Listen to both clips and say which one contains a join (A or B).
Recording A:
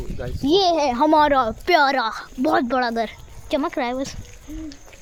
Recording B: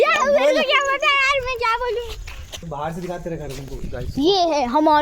B